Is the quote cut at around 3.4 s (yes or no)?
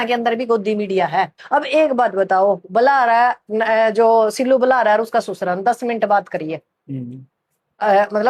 no